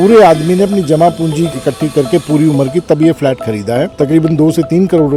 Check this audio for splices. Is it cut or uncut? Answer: uncut